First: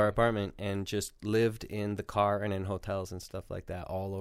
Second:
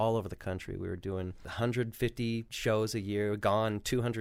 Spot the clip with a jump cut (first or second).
second